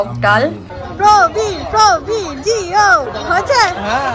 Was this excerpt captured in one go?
no; 2 cuts; at 0.9 s, 3.1 s

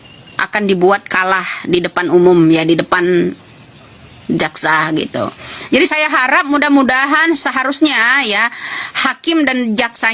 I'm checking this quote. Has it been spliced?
no; 0 cuts

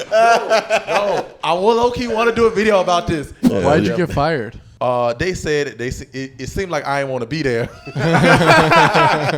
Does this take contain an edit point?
yes; 2 cuts; at 3.4 s, 4.6 s

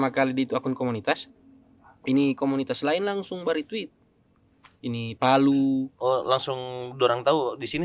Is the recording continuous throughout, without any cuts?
yes; 0 cuts

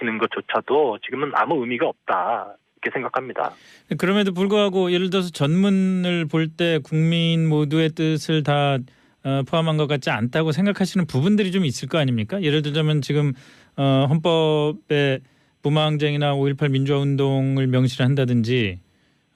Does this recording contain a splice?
yes; 1 cut; at 6.5 s

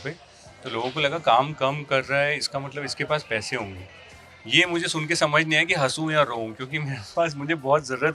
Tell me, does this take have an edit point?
no; 0 cuts

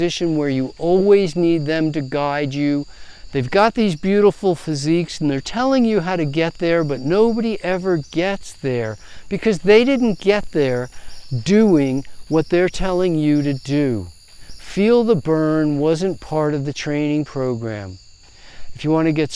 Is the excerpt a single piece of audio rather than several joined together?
yes; 0 cuts

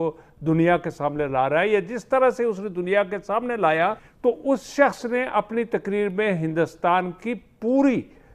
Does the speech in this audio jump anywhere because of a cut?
yes; 1 cut; at 4.1 s

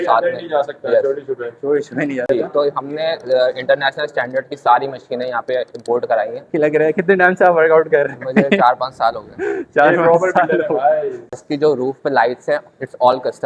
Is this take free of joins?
no; 3 cuts; at 2.3 s, 6.5 s, 11.4 s

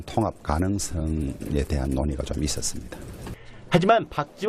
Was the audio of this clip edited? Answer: no; 0 cuts

